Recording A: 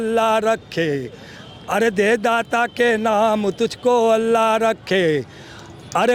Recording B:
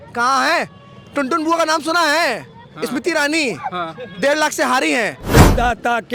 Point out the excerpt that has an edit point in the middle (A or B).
B